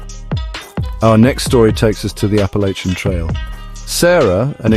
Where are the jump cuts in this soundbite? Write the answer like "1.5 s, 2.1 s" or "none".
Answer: 0.9 s